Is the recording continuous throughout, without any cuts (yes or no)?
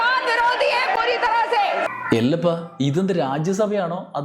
no